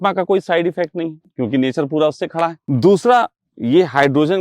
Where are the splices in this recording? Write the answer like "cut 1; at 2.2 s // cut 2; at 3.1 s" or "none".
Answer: cut 1; at 1.2 s // cut 2; at 2.6 s